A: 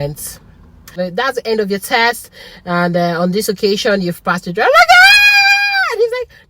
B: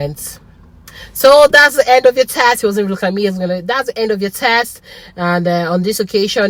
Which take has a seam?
A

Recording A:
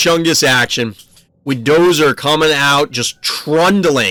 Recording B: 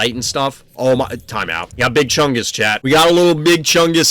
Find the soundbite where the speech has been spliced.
B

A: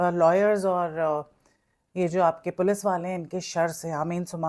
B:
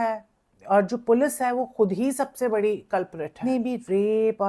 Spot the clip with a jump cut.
B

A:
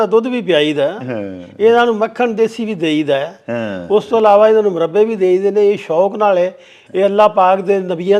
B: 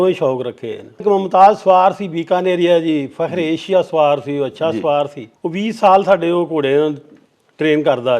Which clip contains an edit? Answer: B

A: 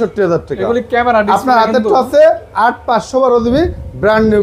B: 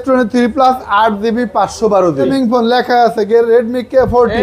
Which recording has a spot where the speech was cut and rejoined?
B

